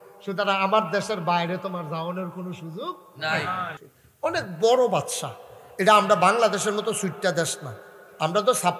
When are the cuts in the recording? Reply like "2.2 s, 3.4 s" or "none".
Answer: 3.8 s